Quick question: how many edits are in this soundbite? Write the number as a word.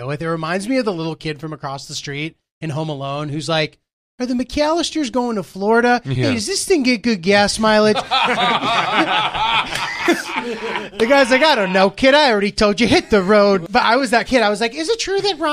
one